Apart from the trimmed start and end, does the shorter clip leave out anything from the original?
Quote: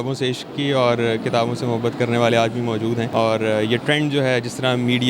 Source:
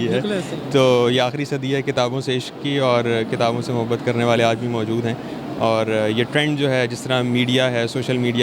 yes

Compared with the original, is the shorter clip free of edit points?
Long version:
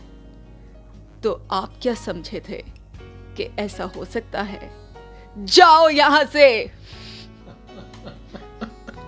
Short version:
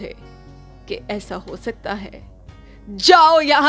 yes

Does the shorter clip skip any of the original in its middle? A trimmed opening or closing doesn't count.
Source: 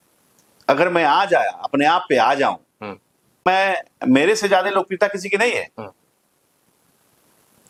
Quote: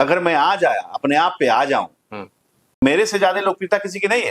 yes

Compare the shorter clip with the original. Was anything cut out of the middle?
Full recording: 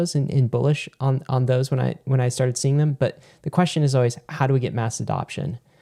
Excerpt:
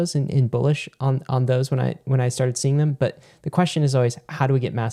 no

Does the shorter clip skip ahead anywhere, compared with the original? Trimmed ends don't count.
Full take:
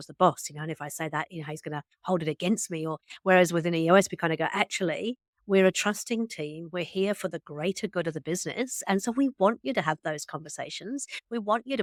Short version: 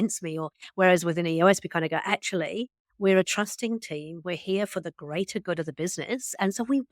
no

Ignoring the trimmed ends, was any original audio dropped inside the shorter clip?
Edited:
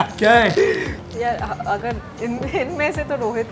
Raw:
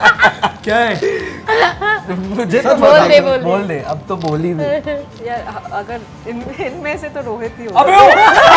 yes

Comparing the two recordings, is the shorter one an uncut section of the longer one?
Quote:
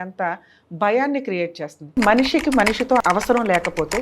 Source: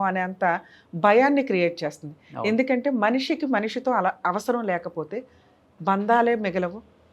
no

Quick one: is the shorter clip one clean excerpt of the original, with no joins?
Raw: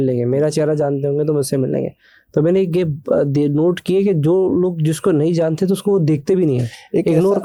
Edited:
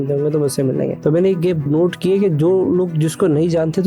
no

